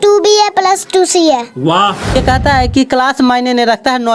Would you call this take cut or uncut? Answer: cut